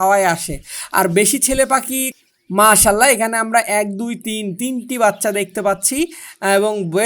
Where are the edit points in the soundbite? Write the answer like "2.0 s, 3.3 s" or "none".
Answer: 2.1 s

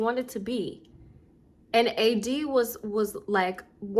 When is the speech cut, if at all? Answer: none

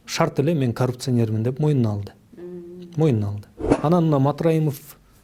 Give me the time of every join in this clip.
3.6 s

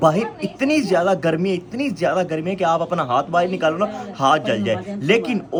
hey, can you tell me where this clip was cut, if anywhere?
none

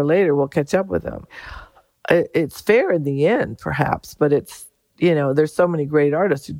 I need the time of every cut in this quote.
none

